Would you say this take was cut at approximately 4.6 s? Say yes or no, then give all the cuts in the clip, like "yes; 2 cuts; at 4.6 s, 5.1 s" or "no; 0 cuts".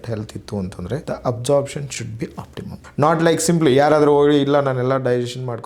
no; 2 cuts; at 1.0 s, 2.7 s